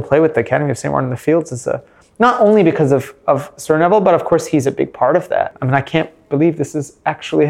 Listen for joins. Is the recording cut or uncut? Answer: cut